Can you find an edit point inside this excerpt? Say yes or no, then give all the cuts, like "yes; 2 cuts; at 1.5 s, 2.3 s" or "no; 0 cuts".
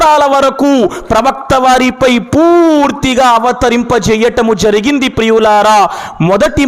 no; 0 cuts